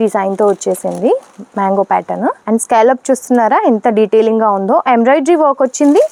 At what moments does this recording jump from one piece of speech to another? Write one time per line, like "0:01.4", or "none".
none